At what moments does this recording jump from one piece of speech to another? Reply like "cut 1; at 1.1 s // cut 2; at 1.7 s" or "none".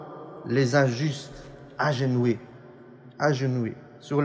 none